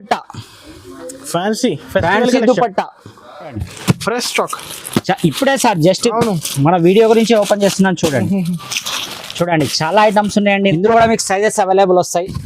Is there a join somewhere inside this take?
yes; 2 cuts; at 3.6 s, 10.7 s

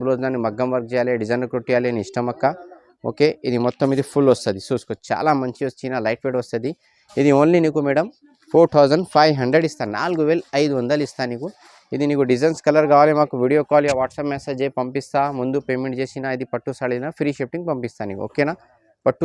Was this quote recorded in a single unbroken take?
yes; 0 cuts

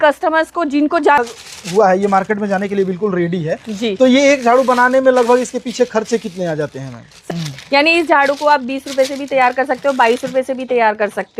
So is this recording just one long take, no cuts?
no; 2 cuts; at 1.2 s, 7.3 s

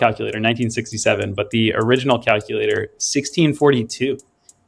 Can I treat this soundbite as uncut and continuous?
yes; 0 cuts

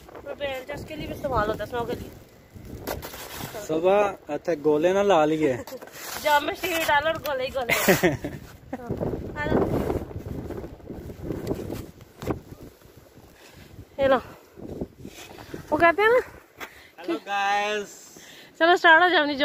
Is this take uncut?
no; 1 cut; at 8.9 s

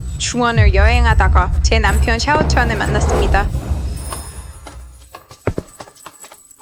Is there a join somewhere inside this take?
no; 0 cuts

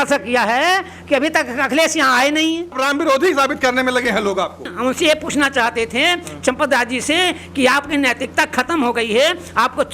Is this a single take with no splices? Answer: no; 2 cuts; at 2.8 s, 4.7 s

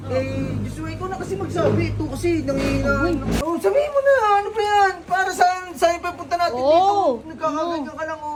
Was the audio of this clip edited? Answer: no; 0 cuts

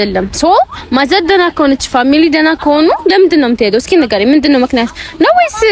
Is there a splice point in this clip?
no; 0 cuts

